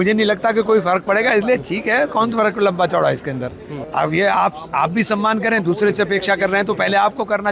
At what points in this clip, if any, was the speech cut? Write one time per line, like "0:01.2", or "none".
0:03.8